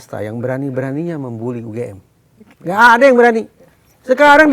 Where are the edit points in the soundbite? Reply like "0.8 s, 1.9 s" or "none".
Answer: none